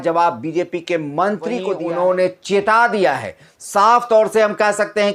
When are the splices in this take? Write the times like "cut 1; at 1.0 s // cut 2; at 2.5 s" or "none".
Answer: cut 1; at 1.7 s